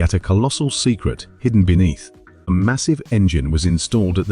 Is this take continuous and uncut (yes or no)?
no